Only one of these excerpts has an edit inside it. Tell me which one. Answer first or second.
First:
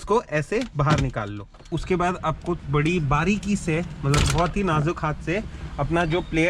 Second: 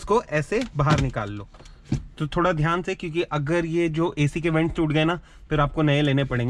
first